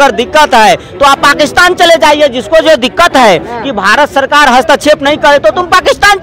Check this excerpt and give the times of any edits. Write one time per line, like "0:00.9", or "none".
none

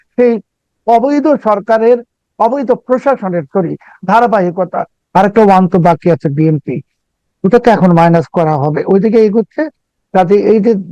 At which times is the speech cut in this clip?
0:05.0

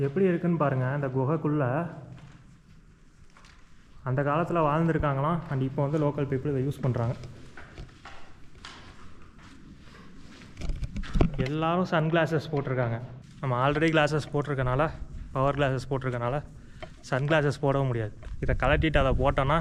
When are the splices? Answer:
none

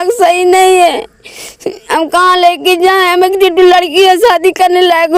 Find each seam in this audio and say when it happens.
none

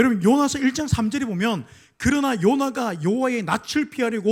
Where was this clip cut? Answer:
none

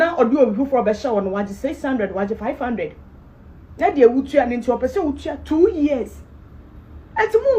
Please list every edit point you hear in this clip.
none

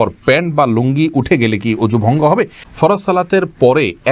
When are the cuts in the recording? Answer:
0:02.7

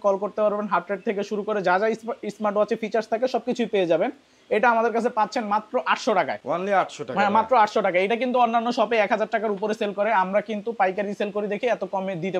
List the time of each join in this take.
none

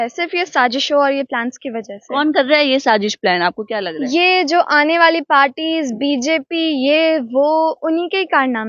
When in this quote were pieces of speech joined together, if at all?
none

